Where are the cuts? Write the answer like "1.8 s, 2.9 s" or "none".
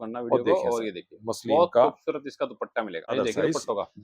3.1 s

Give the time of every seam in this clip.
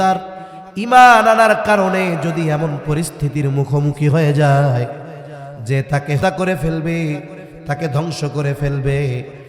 6.2 s

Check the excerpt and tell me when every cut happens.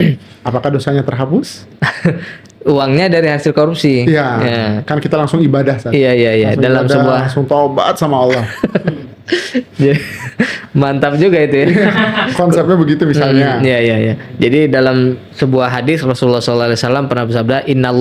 none

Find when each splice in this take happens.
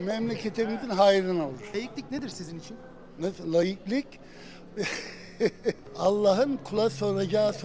1.7 s, 5.8 s

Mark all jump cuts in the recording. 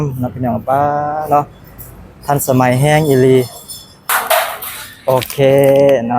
4.0 s

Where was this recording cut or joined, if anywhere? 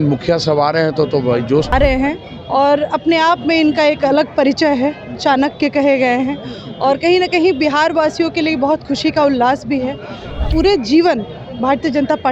1.7 s, 10.5 s

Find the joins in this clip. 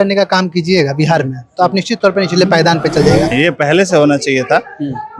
3.3 s

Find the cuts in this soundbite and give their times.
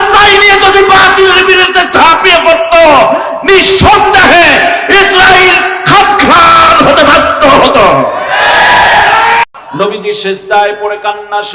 9.5 s

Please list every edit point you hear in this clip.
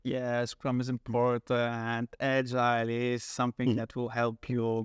none

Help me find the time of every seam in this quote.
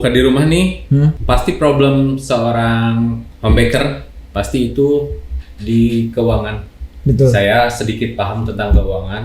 1.2 s, 3.3 s

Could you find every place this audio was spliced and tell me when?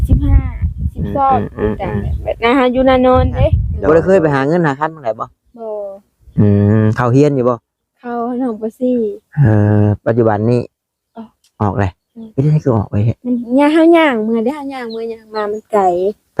3.7 s

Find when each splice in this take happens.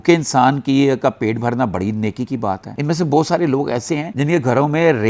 2.7 s, 4.1 s

